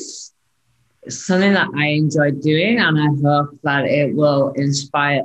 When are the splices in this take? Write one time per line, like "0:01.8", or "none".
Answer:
none